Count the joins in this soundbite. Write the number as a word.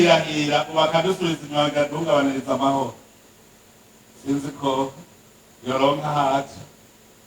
zero